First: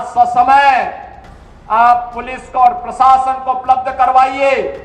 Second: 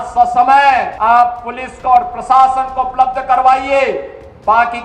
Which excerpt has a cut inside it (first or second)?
second